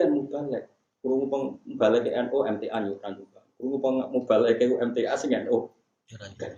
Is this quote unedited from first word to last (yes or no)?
yes